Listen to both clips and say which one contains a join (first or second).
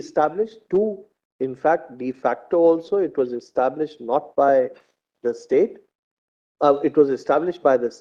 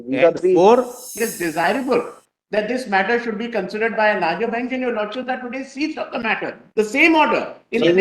second